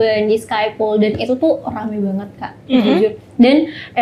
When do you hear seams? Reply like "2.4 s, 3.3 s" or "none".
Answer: none